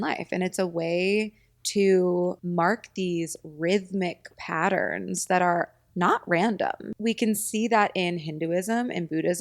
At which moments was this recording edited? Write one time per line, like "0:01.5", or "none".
0:02.4
0:06.9